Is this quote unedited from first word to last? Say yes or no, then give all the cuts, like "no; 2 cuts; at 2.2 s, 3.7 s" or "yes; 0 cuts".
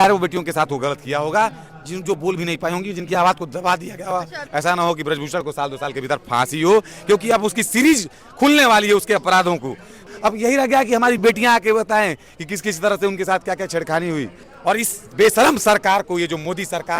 no; 3 cuts; at 4.4 s, 10.1 s, 14.4 s